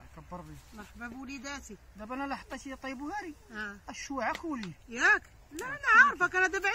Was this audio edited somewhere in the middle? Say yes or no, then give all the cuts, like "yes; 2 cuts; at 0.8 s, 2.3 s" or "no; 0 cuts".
no; 0 cuts